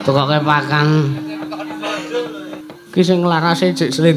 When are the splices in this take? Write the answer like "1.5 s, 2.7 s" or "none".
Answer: 2.6 s